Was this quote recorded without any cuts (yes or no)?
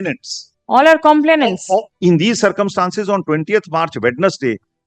no